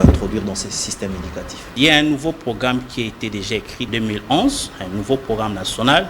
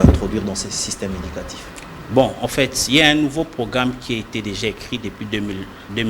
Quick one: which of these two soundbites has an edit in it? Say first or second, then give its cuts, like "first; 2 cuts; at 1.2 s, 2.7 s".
first; 2 cuts; at 1.7 s, 3.8 s